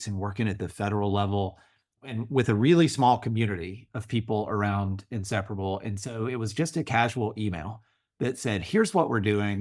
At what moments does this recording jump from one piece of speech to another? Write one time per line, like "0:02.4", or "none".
0:01.9

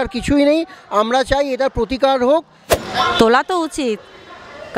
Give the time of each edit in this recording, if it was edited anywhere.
0:02.6

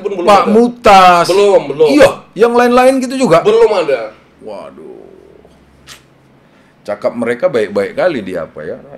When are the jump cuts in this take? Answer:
none

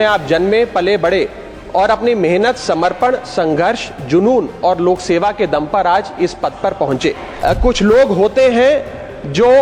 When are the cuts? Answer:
0:07.3

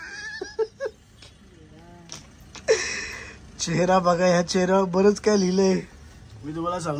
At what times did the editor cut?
none

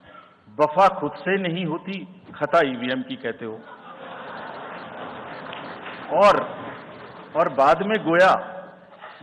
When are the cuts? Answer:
none

